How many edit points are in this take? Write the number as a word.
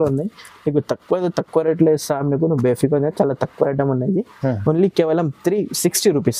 zero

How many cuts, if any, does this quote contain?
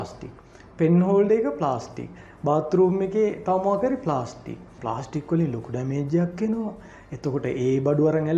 one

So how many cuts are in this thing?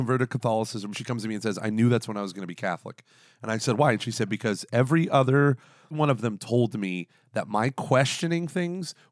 two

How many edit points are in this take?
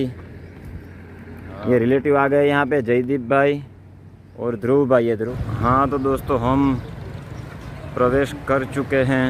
one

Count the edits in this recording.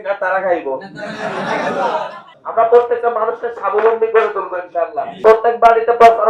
two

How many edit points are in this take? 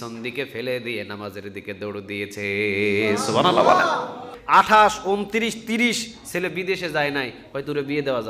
one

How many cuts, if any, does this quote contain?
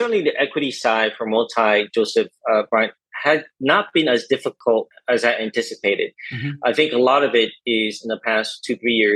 zero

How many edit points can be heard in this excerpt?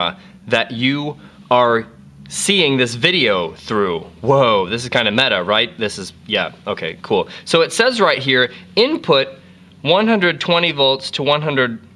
one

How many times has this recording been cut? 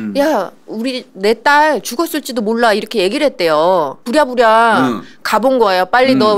one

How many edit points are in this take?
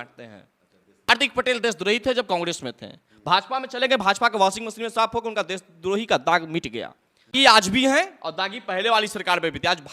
two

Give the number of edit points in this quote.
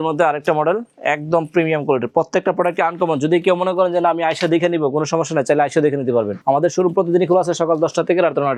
zero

